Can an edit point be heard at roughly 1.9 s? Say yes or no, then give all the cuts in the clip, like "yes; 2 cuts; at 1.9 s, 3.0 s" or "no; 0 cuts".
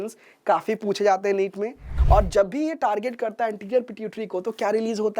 yes; 1 cut; at 1.9 s